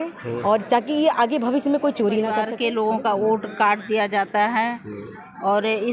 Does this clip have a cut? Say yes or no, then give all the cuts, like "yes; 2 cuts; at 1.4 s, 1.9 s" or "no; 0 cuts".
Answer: yes; 1 cut; at 2.4 s